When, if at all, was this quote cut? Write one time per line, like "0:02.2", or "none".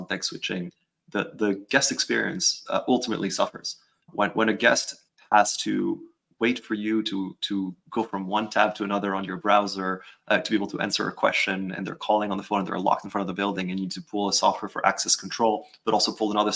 0:04.1
0:05.0